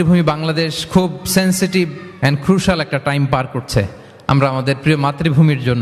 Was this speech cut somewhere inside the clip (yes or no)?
no